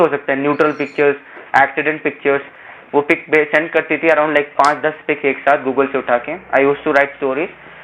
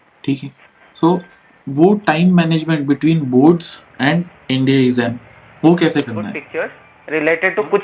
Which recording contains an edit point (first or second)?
second